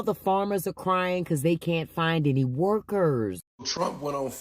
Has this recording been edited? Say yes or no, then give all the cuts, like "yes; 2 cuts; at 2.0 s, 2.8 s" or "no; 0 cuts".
yes; 1 cut; at 3.4 s